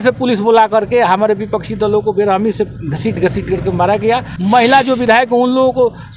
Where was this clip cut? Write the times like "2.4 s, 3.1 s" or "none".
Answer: 4.3 s